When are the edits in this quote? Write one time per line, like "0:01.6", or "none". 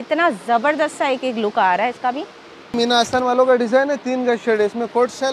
0:02.7